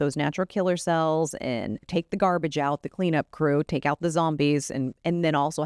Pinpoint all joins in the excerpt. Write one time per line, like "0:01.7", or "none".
0:01.9